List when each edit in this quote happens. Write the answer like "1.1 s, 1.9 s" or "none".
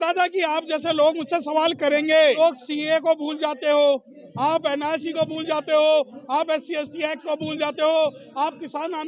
2.4 s